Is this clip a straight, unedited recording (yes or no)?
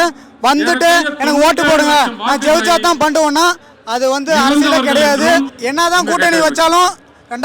no